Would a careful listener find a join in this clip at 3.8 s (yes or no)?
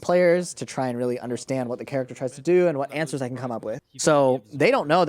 yes